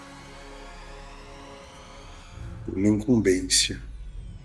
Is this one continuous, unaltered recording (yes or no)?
no